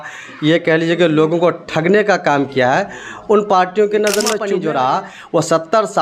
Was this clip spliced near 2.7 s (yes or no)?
no